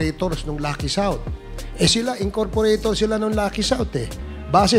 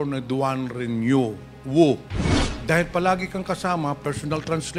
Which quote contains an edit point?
second; 1 cut; at 2.1 s

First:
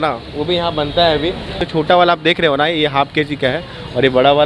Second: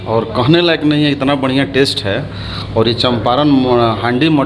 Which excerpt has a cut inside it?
first; 1 cut; at 1.6 s

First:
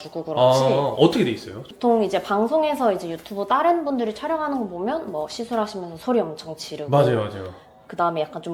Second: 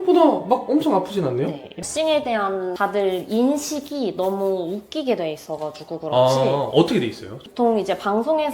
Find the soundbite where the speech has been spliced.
second; 1 cut; at 1.7 s

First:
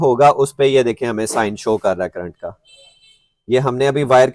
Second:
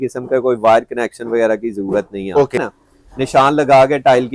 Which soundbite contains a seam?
second; 1 cut; at 2.6 s

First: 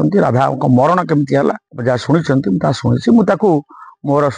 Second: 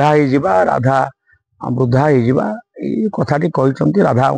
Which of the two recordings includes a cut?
first; 1 cut; at 1.7 s

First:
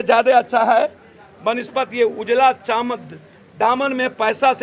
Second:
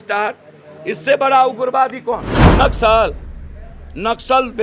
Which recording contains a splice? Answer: second; 1 cut; at 2.4 s

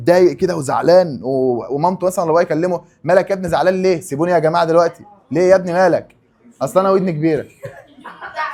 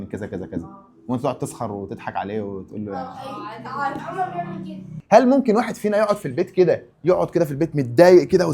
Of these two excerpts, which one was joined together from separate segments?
second; 2 cuts; at 5.0 s, 6.9 s

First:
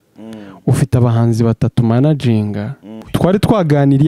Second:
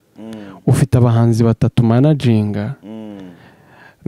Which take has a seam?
first; 1 cut; at 3.0 s

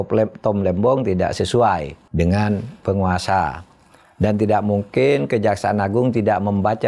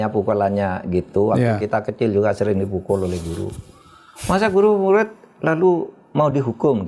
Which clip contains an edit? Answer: first; 1 cut; at 2.0 s

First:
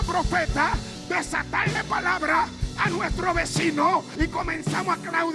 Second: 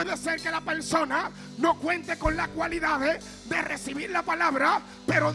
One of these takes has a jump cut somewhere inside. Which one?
first; 2 cuts; at 0.9 s, 4.1 s

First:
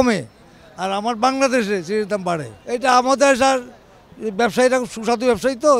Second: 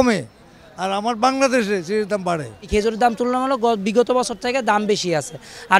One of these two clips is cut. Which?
second; 1 cut; at 2.7 s

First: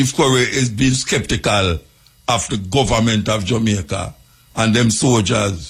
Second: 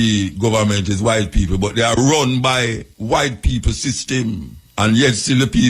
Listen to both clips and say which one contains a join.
second; 2 cuts; at 2.9 s, 4.6 s

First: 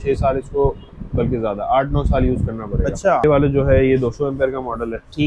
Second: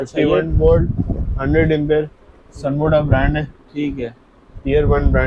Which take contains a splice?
first; 1 cut; at 3.2 s

